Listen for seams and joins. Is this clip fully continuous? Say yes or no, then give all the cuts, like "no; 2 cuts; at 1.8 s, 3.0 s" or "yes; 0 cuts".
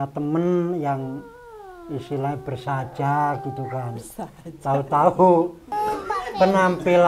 no; 1 cut; at 5.6 s